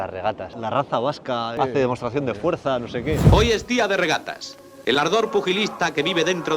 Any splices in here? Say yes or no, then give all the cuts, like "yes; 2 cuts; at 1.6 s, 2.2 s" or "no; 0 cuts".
no; 0 cuts